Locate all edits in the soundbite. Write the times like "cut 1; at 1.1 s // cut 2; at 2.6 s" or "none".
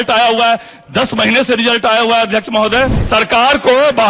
cut 1; at 3.0 s